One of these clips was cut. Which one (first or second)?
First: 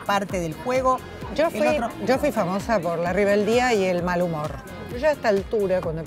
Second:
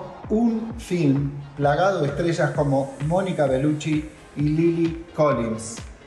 first